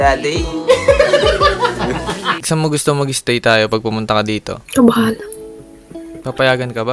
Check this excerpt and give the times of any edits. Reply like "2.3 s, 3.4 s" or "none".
2.2 s